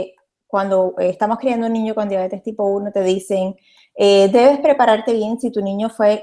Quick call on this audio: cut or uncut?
cut